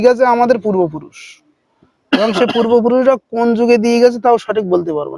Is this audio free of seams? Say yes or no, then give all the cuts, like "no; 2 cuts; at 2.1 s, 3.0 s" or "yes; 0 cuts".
yes; 0 cuts